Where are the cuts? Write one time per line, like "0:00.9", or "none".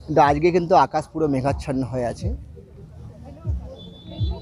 none